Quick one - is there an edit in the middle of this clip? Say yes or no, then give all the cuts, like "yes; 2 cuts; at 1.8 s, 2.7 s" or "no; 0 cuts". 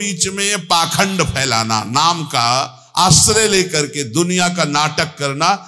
no; 0 cuts